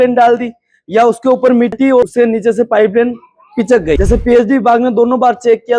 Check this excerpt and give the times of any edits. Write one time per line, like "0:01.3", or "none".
0:02.1
0:04.0